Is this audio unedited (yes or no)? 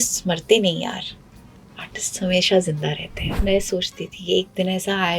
no